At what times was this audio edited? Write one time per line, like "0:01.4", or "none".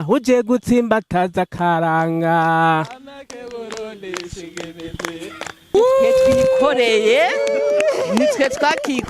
0:05.8